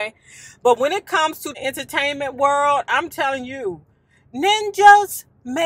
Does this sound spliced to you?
yes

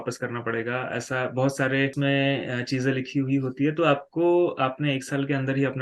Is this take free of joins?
no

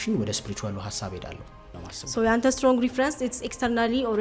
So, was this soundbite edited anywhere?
yes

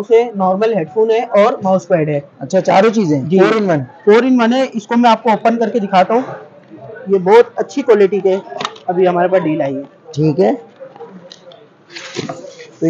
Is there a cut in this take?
no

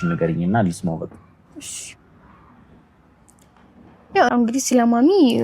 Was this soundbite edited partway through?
yes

